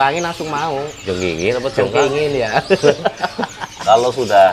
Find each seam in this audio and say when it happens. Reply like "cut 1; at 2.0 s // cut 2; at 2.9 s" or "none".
cut 1; at 1.0 s // cut 2; at 3.7 s